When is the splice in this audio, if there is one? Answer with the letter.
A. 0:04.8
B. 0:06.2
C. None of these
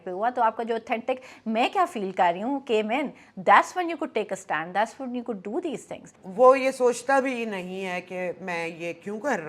B